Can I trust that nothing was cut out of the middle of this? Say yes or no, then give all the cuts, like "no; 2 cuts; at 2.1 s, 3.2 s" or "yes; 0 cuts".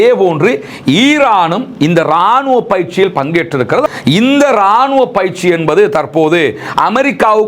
no; 1 cut; at 3.9 s